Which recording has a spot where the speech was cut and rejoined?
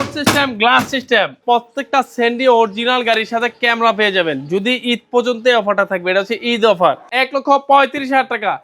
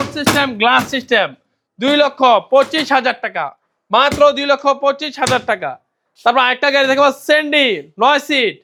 first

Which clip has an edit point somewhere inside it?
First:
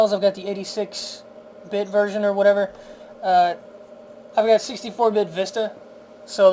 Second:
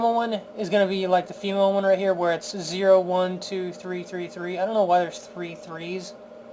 first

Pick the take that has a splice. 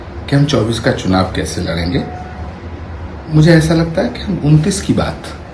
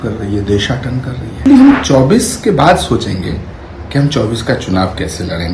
second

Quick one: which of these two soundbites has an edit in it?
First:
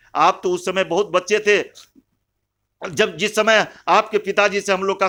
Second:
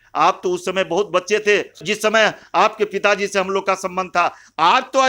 second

